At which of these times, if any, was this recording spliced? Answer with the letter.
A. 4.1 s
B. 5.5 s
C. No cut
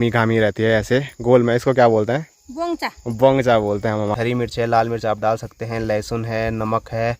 A